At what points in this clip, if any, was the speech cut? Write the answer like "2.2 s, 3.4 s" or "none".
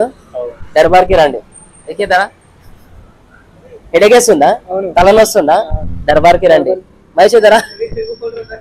none